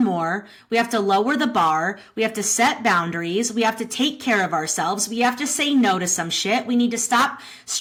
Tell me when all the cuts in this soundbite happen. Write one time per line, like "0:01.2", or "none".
none